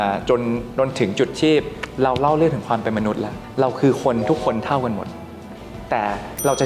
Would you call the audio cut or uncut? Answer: cut